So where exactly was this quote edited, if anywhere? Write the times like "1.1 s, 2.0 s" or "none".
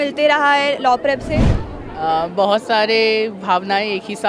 1.5 s